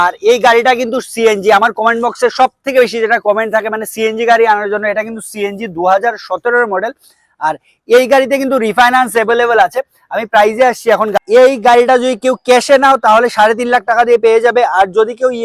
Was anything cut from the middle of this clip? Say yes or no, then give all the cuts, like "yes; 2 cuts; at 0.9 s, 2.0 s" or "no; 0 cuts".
no; 0 cuts